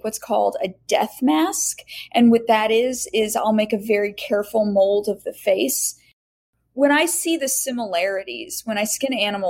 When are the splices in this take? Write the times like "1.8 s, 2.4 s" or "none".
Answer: 6.1 s